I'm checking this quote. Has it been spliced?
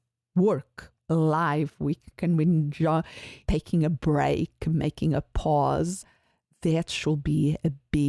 yes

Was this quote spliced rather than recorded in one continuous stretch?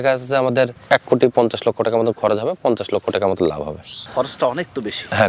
no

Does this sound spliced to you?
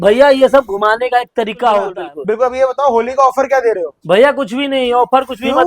yes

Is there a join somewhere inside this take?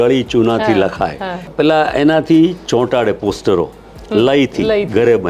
yes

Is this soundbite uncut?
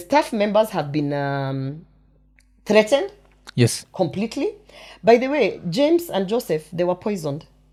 yes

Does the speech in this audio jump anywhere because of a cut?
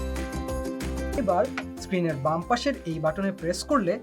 yes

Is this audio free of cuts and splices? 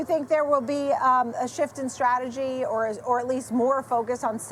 yes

